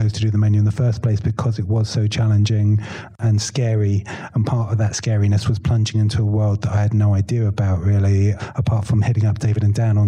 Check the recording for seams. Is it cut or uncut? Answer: cut